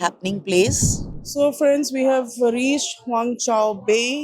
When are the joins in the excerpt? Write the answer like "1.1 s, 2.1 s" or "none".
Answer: 1.0 s